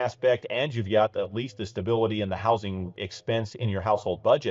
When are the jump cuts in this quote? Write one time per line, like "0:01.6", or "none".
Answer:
0:03.0